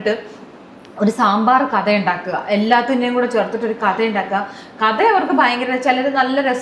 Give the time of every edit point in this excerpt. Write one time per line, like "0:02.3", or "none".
none